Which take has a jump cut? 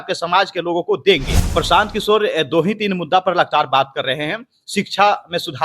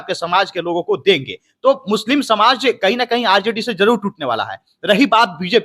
first; 1 cut; at 1.5 s

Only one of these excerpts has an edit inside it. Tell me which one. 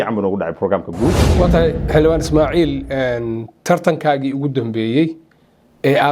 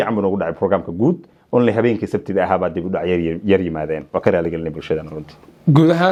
first; 1 cut; at 1.2 s

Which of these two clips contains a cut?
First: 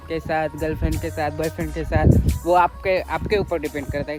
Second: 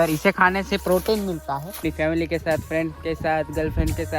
second; 1 cut; at 1.7 s

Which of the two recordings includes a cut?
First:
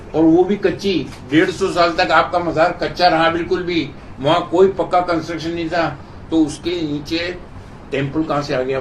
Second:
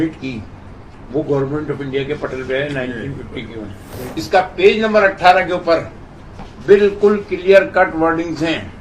second; 1 cut; at 3.9 s

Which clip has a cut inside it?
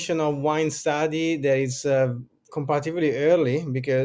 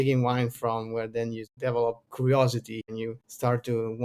second; 2 cuts; at 1.8 s, 2.8 s

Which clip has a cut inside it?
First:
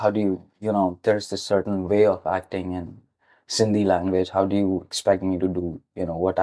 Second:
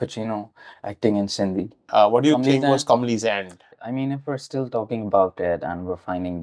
second; 2 cuts; at 1.8 s, 3.7 s

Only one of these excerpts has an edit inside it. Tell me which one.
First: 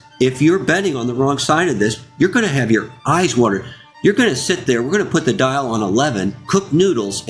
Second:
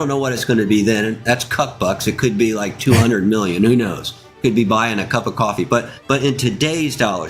second; 1 cut; at 5.9 s

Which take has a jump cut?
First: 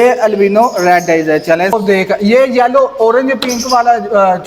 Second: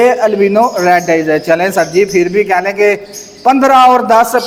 first; 1 cut; at 1.7 s

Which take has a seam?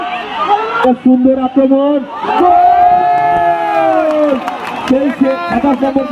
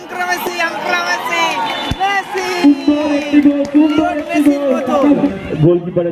second; 1 cut; at 5.2 s

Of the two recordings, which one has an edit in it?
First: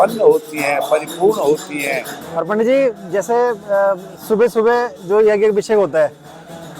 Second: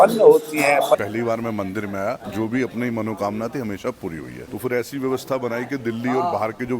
second; 3 cuts; at 1.0 s, 2.3 s, 4.4 s

